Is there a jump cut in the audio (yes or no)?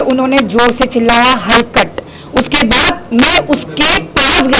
no